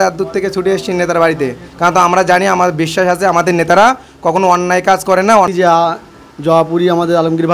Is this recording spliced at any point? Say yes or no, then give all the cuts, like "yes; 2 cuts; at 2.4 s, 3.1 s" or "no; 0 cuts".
yes; 1 cut; at 5.5 s